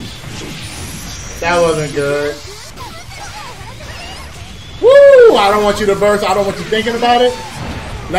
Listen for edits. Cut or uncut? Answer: cut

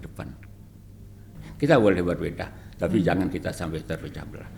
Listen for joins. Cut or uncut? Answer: cut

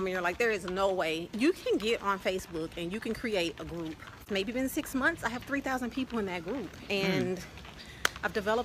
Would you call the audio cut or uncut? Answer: cut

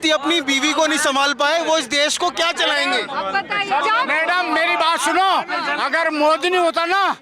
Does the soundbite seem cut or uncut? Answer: cut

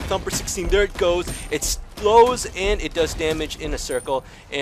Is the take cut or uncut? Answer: uncut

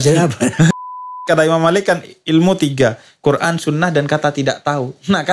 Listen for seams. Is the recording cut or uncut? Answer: cut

